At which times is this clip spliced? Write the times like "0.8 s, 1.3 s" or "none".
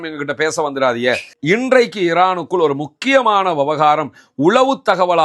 1.3 s